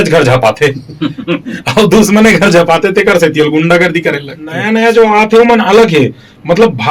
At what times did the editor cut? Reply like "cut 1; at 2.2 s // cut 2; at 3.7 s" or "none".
cut 1; at 4.7 s

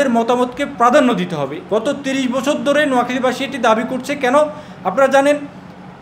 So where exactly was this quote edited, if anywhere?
cut 1; at 1.6 s

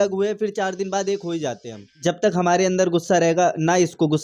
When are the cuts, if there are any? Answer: none

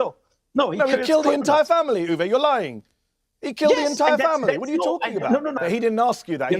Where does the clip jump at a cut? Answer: cut 1; at 5.6 s

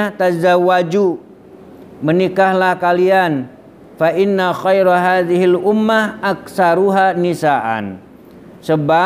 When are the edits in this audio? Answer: none

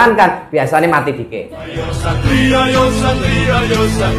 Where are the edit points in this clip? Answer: cut 1; at 1.9 s

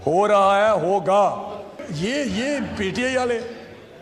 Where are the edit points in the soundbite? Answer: cut 1; at 1.8 s

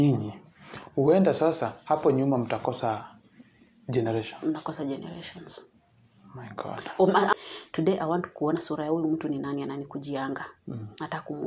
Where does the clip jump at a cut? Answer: cut 1; at 7.3 s

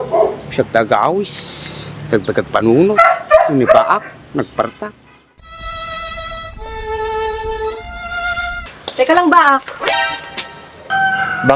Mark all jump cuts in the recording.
cut 1; at 8.7 s

